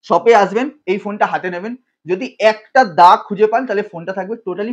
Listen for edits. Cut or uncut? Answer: uncut